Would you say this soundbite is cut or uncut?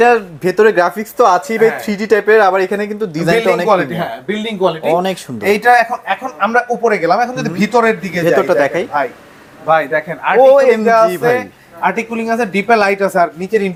uncut